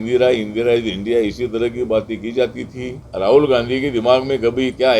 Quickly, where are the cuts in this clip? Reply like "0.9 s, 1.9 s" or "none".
3.1 s